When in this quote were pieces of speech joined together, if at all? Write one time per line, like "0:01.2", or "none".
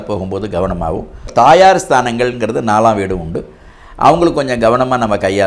0:01.3